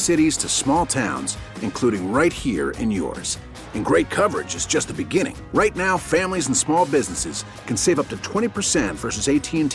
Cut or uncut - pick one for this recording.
uncut